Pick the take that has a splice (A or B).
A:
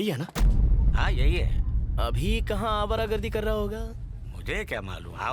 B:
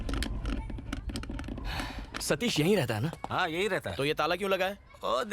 B